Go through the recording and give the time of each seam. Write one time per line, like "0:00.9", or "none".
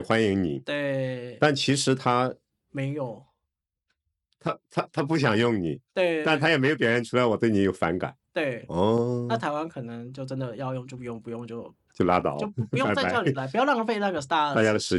none

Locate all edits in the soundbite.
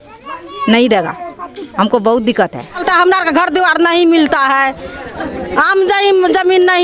0:02.8

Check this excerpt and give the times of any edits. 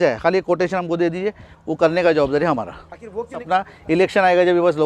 0:03.4

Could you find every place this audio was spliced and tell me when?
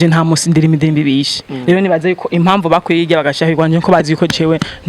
none

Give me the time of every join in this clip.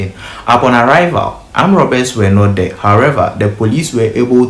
none

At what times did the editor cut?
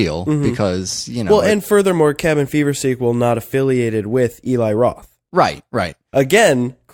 none

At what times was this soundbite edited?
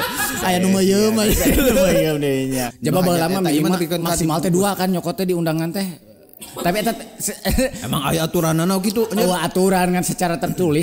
0:02.7

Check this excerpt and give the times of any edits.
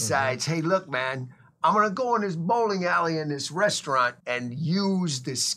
0:04.2

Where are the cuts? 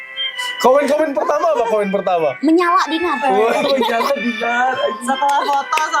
none

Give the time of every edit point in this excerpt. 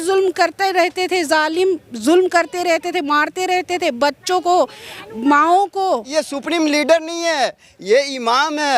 0:06.1

